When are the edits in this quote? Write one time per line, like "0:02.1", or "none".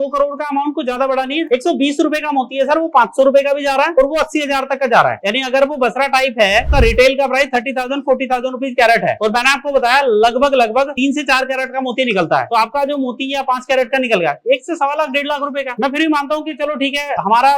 0:01.5
0:06.7